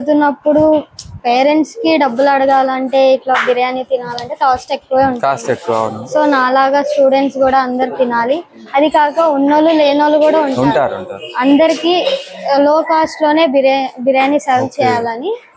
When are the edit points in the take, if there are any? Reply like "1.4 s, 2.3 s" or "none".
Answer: none